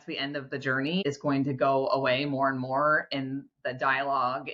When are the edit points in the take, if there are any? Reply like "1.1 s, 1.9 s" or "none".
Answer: 1.0 s